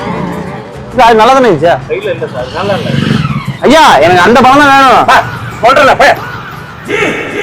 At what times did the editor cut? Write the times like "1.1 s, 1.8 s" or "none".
3.5 s